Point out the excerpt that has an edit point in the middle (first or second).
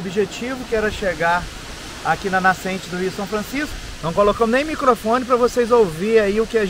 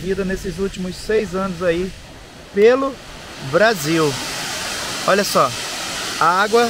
first